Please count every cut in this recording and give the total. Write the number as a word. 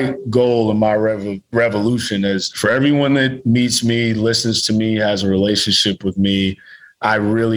one